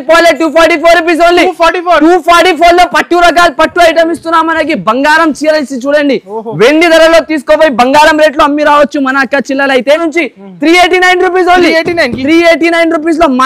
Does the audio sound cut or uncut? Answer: cut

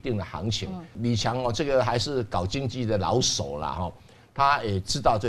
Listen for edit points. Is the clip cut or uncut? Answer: cut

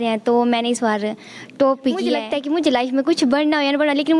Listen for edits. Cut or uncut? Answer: cut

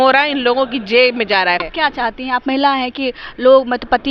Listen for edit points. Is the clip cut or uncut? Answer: cut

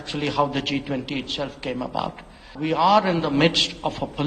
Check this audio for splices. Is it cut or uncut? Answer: cut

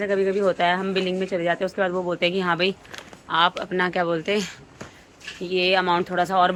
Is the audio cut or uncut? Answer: uncut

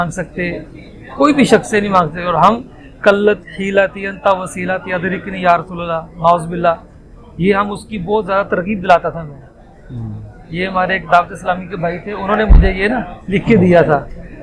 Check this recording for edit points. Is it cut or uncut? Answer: uncut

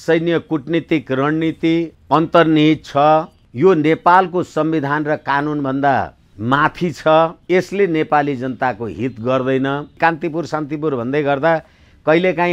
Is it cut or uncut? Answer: cut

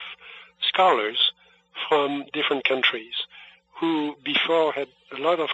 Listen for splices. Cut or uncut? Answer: uncut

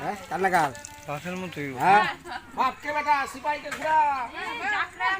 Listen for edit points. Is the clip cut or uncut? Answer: cut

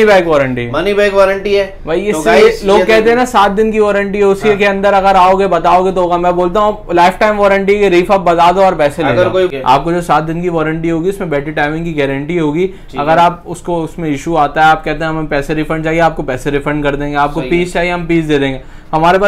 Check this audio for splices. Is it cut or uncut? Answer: cut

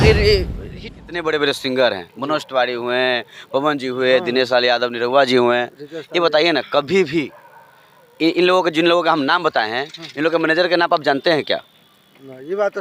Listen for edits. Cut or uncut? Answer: cut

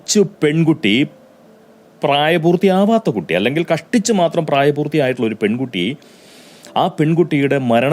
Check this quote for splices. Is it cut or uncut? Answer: uncut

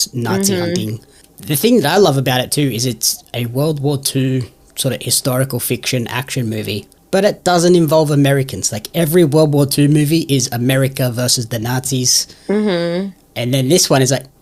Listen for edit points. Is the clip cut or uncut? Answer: uncut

